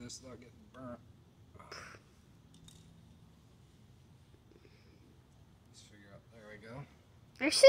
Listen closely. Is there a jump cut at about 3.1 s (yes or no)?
no